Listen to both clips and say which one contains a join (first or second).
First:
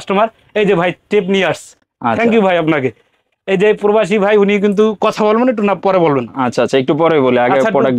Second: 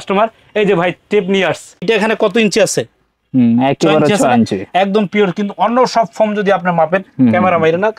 second